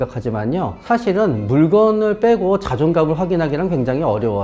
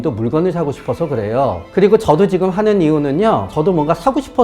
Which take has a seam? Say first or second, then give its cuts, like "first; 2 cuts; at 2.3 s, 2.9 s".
second; 1 cut; at 3.5 s